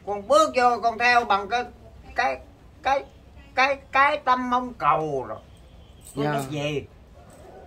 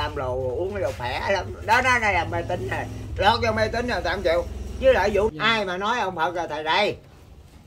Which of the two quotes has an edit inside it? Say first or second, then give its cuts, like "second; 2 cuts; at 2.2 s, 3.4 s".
second; 1 cut; at 5.3 s